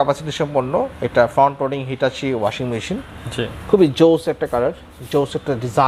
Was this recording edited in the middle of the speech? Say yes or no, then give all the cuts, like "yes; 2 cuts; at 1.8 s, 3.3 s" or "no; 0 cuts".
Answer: no; 0 cuts